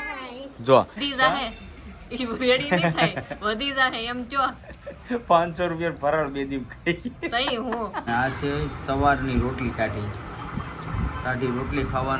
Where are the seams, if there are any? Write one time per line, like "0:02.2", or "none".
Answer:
0:01.1
0:08.1